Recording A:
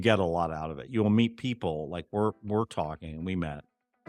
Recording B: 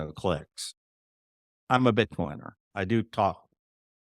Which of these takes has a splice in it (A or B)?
B